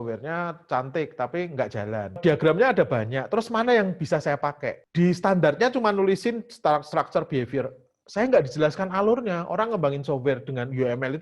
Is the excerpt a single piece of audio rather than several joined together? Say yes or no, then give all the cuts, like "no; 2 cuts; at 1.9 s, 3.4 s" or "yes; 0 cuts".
no; 2 cuts; at 2.1 s, 4.8 s